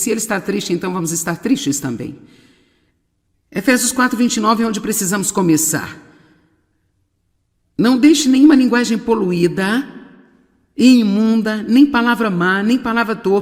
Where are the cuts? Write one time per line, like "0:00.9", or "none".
none

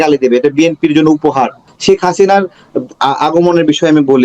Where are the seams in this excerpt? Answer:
0:01.7

